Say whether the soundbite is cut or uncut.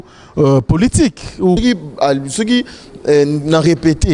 cut